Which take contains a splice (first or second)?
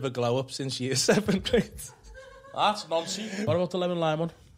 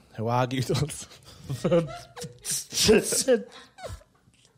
first